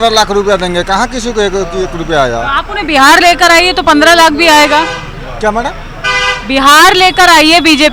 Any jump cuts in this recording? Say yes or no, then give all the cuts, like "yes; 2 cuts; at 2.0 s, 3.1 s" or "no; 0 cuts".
no; 0 cuts